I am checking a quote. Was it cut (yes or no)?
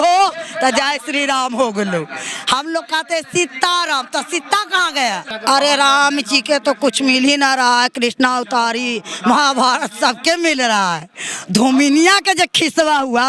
yes